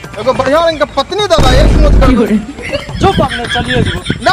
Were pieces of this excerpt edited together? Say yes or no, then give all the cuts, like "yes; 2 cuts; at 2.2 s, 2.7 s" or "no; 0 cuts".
no; 0 cuts